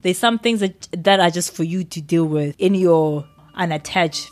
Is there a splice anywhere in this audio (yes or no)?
yes